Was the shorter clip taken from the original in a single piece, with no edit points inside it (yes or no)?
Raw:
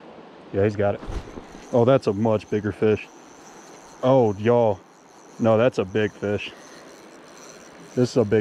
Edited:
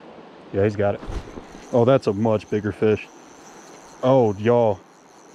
yes